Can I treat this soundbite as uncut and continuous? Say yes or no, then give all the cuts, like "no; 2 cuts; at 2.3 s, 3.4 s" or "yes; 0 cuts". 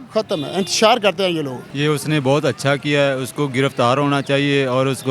no; 1 cut; at 1.6 s